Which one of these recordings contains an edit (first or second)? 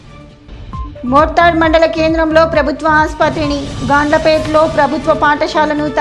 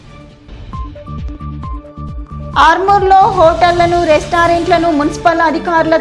second